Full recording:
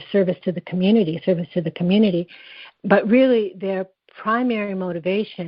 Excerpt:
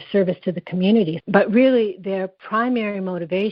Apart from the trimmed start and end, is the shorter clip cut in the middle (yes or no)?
yes